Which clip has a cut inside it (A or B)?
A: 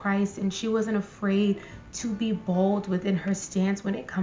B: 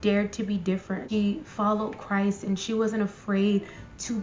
B